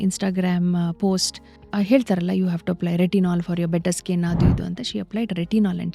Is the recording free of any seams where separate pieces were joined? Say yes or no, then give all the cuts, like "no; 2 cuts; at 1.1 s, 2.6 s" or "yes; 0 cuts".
no; 1 cut; at 1.6 s